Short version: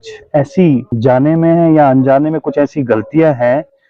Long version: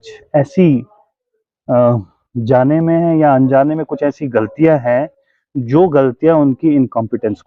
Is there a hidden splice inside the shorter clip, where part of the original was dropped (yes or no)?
yes